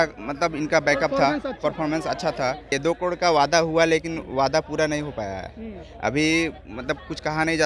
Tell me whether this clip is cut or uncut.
cut